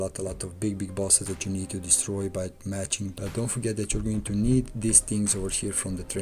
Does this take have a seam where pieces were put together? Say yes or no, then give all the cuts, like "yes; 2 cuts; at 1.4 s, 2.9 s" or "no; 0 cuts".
yes; 1 cut; at 3.1 s